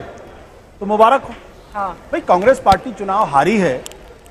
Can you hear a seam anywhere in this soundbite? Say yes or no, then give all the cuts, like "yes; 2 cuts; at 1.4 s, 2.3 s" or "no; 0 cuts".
no; 0 cuts